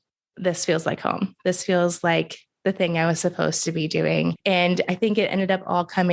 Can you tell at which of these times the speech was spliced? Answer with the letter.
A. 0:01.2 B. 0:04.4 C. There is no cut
B